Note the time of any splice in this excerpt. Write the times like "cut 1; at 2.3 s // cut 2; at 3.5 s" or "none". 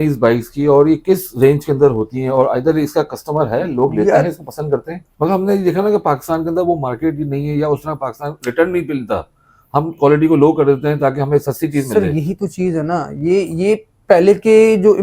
cut 1; at 5.0 s